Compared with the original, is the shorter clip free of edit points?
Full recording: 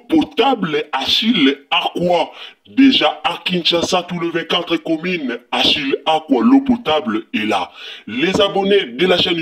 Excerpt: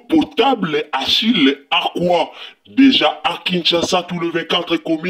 yes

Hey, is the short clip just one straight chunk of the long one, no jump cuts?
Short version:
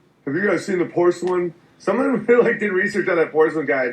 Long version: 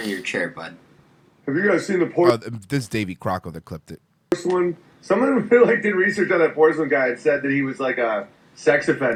no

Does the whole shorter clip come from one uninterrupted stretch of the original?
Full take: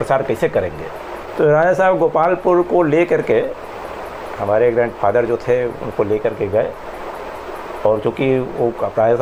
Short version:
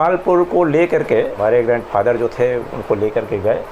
no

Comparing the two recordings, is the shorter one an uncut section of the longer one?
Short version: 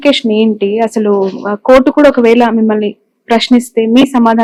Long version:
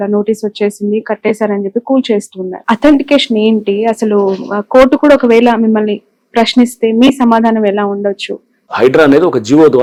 yes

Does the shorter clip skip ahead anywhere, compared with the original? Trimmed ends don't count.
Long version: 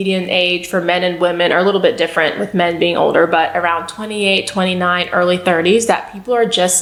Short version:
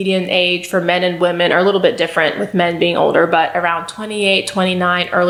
no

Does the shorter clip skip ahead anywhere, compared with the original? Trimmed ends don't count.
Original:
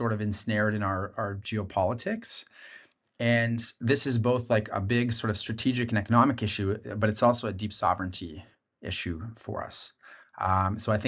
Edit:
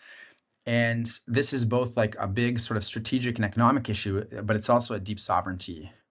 no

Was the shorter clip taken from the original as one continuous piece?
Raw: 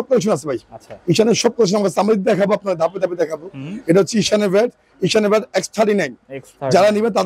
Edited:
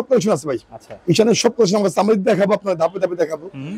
yes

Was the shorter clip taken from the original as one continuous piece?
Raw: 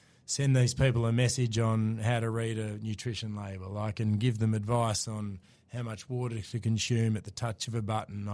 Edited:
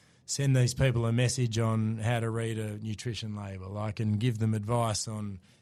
yes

